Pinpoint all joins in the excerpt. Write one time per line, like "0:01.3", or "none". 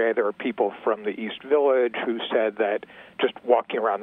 none